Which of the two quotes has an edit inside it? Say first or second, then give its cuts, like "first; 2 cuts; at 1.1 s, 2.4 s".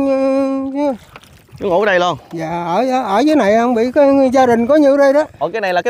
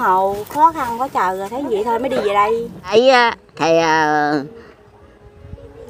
second; 1 cut; at 2.9 s